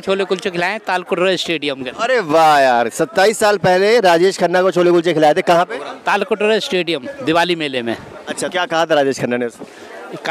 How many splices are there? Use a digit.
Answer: 1